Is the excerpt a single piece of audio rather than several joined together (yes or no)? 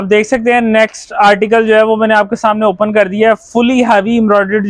yes